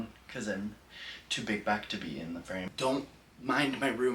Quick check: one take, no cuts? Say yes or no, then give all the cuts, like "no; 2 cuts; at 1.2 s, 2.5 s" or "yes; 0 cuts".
no; 1 cut; at 2.7 s